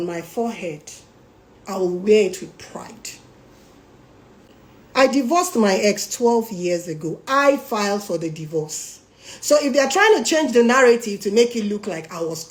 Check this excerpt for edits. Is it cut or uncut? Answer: uncut